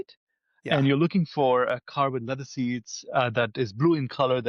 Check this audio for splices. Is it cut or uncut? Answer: uncut